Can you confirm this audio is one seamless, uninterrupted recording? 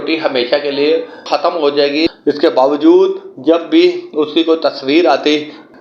no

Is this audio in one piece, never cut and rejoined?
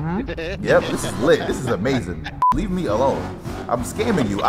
no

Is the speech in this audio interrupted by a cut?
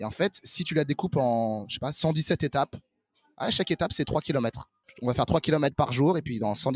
yes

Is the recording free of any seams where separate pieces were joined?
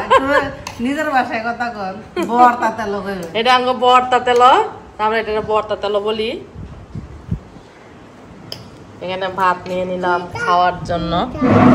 yes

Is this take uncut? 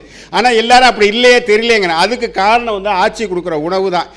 yes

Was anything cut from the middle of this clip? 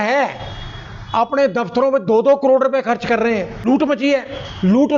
yes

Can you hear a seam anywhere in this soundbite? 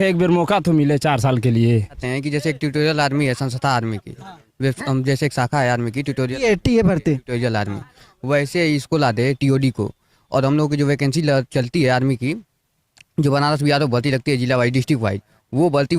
yes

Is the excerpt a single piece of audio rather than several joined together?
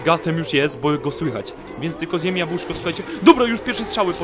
no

